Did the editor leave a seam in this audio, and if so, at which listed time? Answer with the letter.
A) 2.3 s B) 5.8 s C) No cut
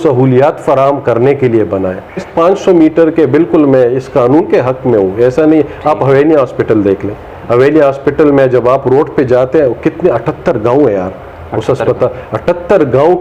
A